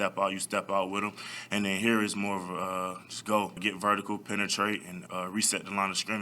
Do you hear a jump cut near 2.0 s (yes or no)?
no